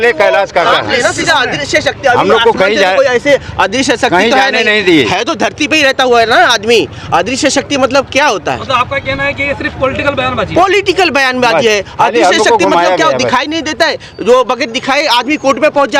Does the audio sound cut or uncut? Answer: uncut